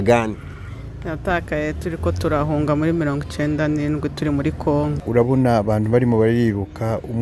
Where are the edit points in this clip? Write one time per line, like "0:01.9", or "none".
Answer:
0:05.0